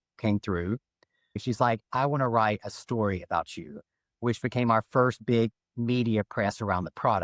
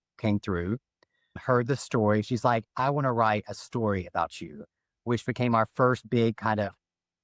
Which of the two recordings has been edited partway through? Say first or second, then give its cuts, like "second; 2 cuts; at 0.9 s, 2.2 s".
first; 2 cuts; at 1.4 s, 5.5 s